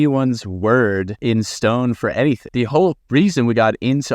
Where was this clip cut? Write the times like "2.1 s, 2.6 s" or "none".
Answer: 1.2 s, 2.7 s